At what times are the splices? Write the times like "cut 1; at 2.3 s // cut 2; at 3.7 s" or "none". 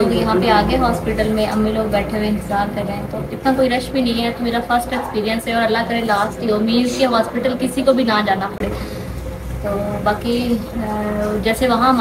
none